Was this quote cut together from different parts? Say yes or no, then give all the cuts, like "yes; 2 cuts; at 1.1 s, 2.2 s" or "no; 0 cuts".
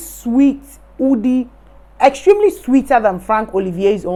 no; 0 cuts